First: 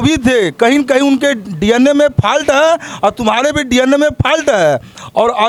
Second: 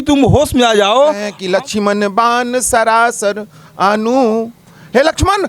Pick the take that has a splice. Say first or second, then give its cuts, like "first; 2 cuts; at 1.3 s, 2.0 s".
second; 1 cut; at 1.3 s